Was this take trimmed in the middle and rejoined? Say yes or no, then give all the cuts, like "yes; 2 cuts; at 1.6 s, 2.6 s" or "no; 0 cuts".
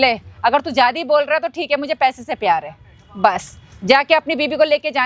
no; 0 cuts